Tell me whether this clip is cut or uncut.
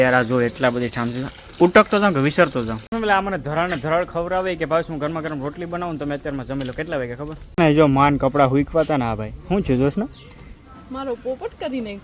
cut